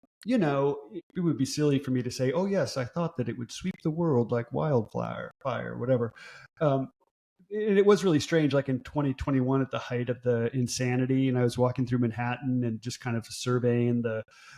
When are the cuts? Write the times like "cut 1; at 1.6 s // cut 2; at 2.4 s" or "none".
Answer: cut 1; at 1.1 s // cut 2; at 7.0 s